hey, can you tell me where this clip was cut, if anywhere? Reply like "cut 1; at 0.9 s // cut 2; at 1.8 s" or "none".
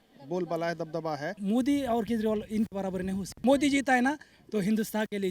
cut 1; at 1.4 s // cut 2; at 3.3 s

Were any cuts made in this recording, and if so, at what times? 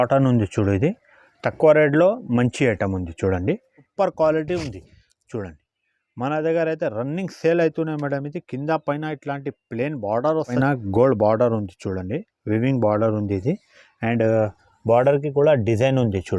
cut 1; at 3.9 s // cut 2; at 10.6 s

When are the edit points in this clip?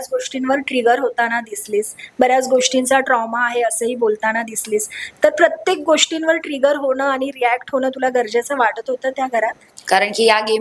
cut 1; at 9.7 s

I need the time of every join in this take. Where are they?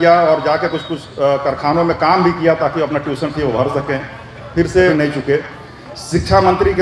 cut 1; at 4.9 s

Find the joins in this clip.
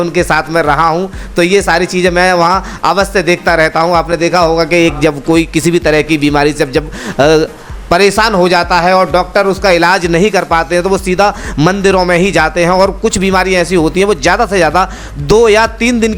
none

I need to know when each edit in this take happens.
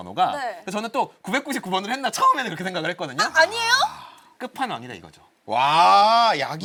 none

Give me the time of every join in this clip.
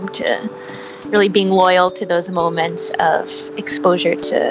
cut 1; at 0.9 s

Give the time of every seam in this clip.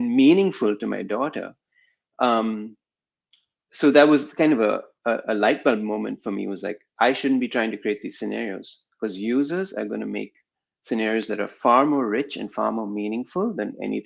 none

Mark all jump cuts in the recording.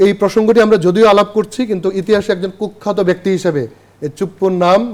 none

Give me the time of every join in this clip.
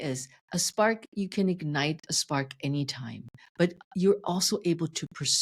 none

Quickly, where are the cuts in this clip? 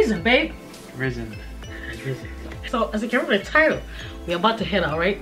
none

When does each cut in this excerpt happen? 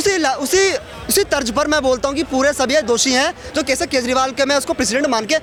none

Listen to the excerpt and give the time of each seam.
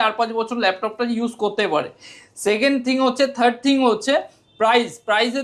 none

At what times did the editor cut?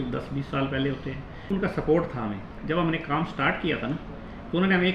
cut 1; at 1.5 s // cut 2; at 2.6 s

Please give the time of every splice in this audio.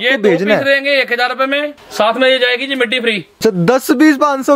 cut 1; at 1.8 s // cut 2; at 3.3 s

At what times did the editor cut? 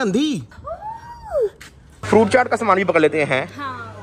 cut 1; at 2.0 s

